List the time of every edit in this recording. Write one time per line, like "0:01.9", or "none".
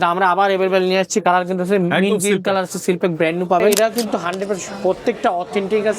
0:03.8